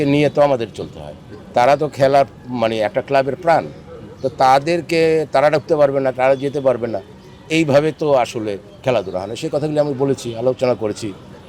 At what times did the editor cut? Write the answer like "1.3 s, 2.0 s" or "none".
none